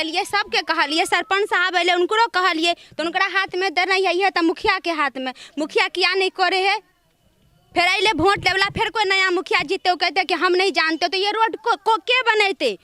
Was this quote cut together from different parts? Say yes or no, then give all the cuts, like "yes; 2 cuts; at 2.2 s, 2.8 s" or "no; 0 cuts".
no; 0 cuts